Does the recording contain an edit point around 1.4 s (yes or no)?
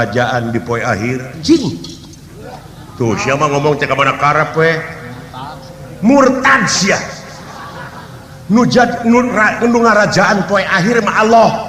yes